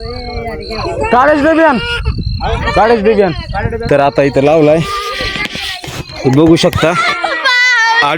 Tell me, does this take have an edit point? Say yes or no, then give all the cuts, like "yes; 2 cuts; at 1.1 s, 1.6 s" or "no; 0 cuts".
yes; 1 cut; at 3.8 s